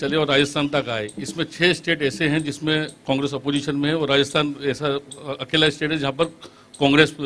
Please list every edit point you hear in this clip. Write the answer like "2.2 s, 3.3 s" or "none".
none